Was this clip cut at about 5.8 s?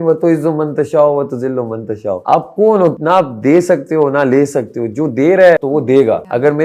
yes; 3 cuts; at 2.2 s, 3.0 s, 5.8 s

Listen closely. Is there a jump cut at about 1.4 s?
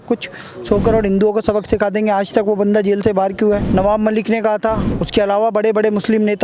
no; 2 cuts; at 3.6 s, 4.9 s

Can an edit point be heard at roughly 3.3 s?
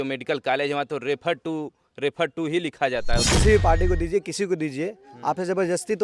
yes; 1 cut; at 3.3 s

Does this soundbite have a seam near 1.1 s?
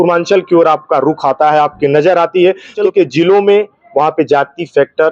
no; 1 cut; at 2.8 s

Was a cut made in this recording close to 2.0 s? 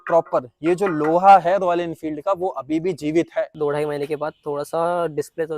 no; 1 cut; at 3.5 s

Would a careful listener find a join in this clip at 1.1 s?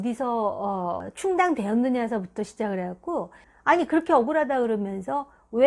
yes; 2 cuts; at 1.1 s, 3.5 s

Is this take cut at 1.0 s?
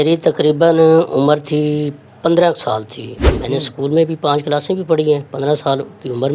no; 0 cuts

